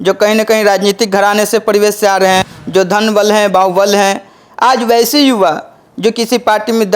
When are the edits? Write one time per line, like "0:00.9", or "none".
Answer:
0:02.6